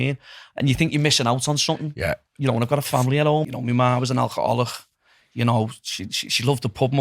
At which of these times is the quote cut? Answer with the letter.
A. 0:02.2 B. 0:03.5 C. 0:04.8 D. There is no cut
B